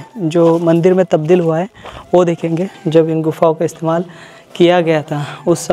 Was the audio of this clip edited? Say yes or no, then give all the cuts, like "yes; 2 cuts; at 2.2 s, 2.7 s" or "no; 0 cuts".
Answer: yes; 1 cut; at 2.8 s